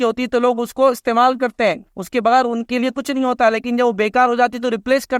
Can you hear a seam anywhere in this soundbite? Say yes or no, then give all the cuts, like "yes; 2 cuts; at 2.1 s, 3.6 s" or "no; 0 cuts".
no; 0 cuts